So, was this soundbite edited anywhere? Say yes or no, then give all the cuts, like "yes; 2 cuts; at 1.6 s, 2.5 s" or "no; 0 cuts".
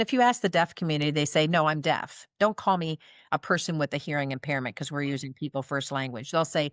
no; 0 cuts